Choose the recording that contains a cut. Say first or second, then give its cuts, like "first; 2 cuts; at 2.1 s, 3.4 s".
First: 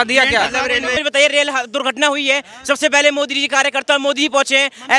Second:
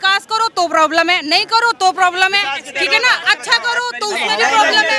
first; 1 cut; at 1.0 s